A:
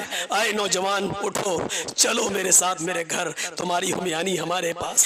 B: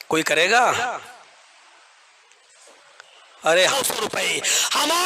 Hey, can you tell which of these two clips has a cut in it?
B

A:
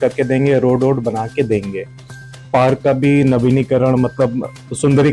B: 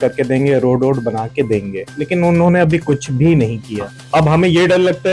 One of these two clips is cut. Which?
B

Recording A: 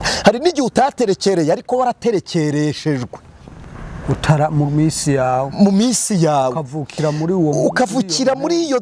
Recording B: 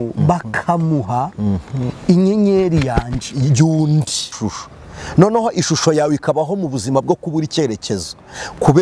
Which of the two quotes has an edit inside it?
B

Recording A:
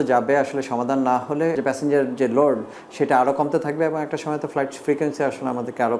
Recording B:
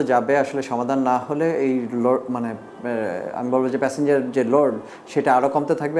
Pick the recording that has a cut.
A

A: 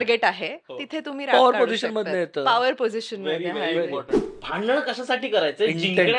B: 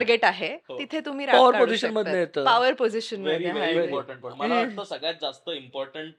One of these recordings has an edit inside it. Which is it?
A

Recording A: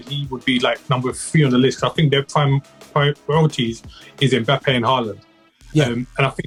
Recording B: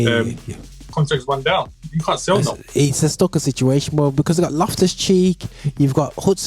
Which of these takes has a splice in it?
B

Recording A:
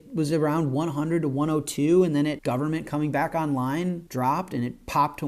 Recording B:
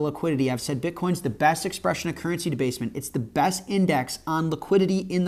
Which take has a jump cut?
A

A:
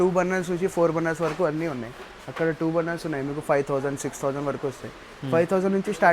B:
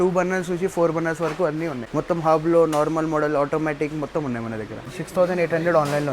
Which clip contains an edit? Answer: B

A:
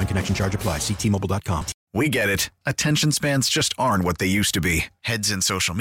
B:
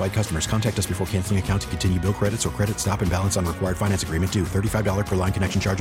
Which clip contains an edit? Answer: A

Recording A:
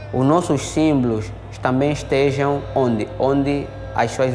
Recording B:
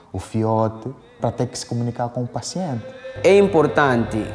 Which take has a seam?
B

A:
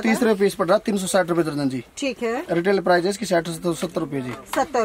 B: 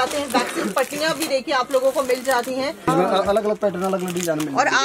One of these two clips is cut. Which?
B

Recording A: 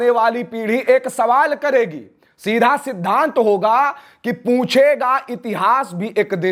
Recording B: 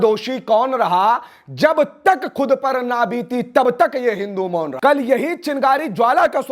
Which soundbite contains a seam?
B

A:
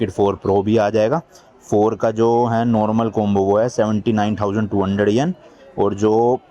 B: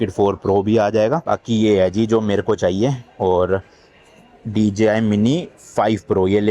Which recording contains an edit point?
B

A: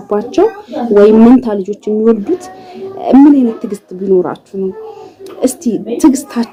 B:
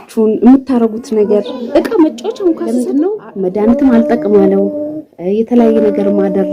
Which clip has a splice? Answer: B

